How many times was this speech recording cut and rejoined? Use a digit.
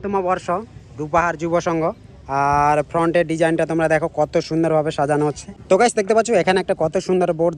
0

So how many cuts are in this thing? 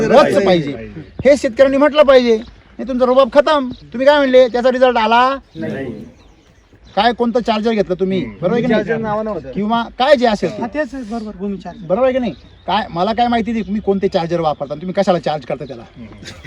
1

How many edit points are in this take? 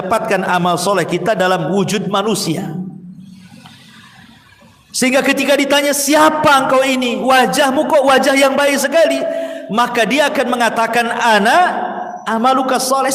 0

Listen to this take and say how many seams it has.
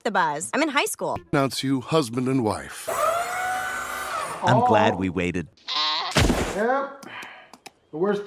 2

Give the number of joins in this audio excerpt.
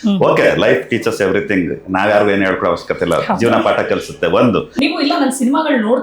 1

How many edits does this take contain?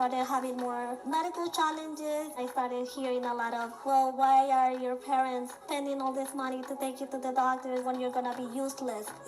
2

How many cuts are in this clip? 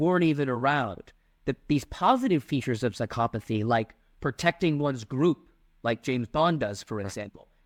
0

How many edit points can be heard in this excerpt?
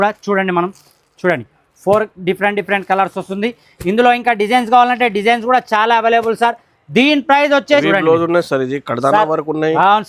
1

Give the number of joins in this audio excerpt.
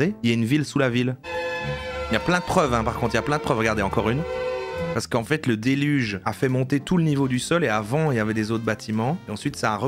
2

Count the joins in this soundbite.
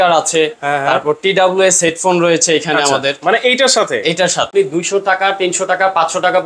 1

